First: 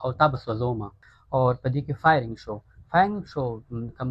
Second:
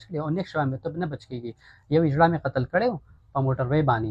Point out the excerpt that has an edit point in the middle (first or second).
first